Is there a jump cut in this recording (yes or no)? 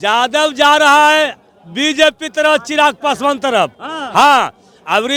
no